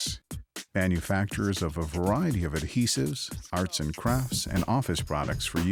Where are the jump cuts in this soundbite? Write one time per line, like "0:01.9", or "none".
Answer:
none